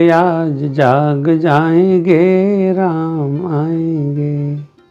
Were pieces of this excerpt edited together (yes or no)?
no